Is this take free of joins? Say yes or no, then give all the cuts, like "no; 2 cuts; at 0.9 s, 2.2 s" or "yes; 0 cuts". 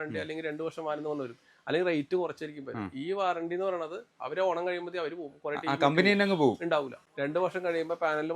no; 1 cut; at 7.0 s